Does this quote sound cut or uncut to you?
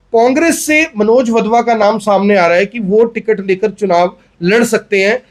uncut